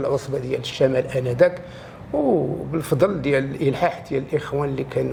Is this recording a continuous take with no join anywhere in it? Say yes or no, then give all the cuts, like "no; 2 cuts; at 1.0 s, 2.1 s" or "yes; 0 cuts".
yes; 0 cuts